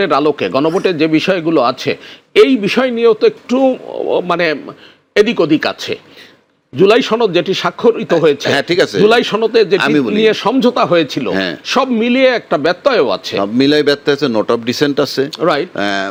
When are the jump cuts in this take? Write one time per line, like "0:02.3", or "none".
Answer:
none

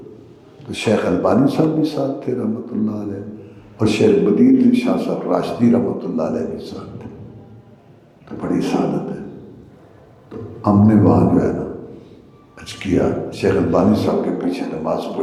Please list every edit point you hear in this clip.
none

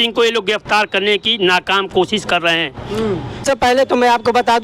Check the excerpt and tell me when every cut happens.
0:03.5

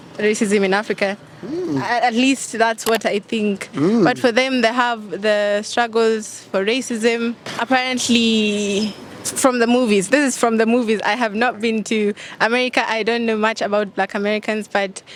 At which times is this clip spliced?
none

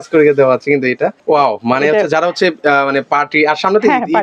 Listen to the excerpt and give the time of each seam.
0:01.2

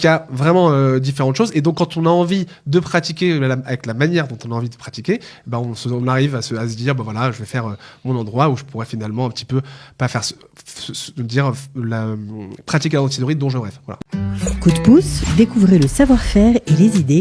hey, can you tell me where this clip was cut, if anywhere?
0:13.9

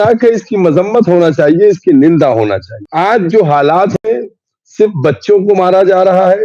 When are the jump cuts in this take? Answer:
0:02.8

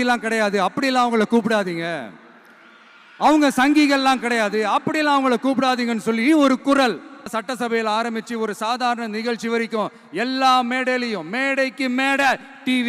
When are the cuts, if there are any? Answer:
0:07.3

